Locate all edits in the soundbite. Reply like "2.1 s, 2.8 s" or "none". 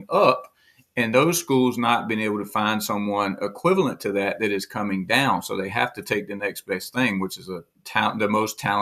none

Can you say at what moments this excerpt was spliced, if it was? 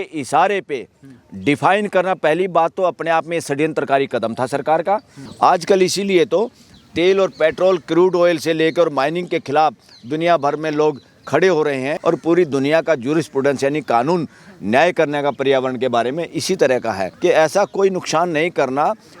5.2 s, 11.9 s, 17.1 s

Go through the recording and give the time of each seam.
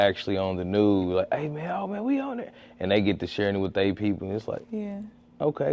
none

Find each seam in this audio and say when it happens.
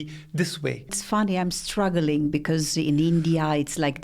1.0 s

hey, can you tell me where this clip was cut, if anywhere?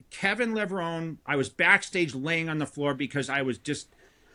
none

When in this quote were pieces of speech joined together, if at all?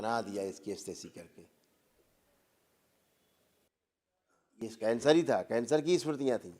3.7 s

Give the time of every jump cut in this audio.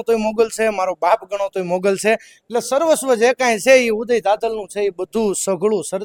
none

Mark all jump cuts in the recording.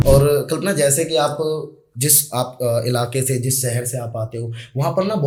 none

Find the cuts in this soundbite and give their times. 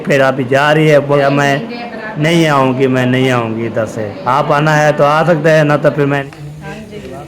1.2 s, 6.2 s

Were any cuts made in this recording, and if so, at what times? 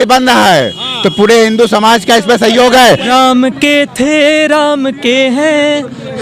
3.1 s

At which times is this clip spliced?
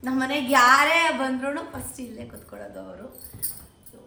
none

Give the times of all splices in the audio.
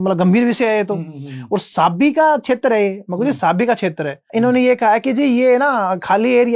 4.3 s

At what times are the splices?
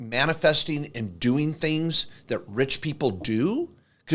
none

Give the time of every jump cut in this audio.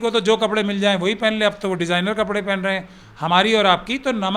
none

